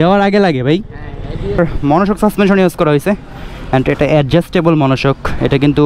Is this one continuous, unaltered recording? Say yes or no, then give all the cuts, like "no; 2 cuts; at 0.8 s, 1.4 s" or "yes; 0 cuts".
no; 1 cut; at 1.6 s